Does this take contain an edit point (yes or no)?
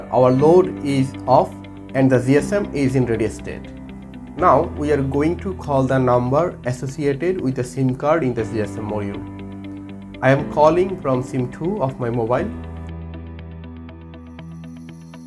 yes